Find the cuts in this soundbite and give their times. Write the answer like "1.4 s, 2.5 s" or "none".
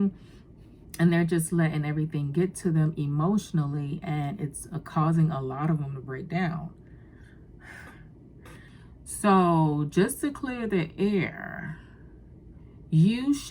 8.7 s